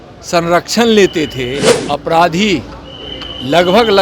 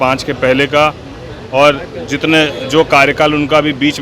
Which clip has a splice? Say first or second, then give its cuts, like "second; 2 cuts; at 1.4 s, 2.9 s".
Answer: first; 1 cut; at 1.7 s